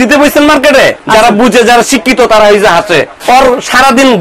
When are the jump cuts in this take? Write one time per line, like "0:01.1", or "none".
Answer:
0:01.0
0:03.1

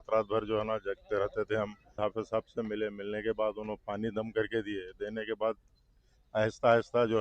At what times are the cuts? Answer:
0:02.0

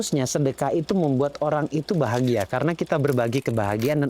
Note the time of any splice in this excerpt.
none

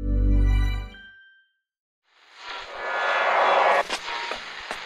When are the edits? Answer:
0:01.9

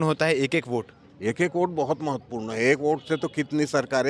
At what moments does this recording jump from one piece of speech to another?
none

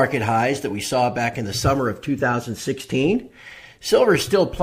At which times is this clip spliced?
none

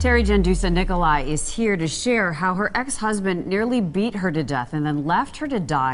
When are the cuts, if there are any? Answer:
none

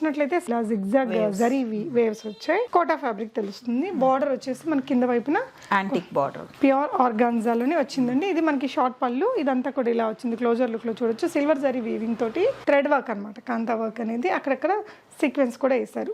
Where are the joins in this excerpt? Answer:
0:06.4
0:12.6

